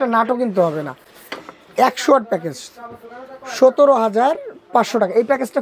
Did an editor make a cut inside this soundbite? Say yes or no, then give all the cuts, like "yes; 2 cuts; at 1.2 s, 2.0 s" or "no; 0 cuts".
no; 0 cuts